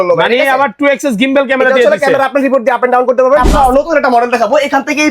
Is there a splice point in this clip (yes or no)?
yes